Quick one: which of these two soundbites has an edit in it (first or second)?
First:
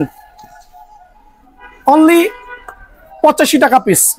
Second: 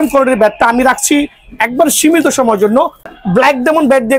second